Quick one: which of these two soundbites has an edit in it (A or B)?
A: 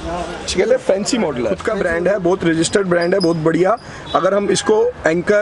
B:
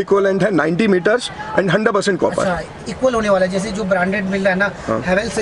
A